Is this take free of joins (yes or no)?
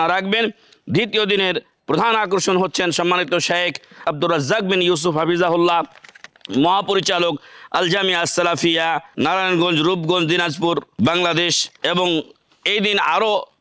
no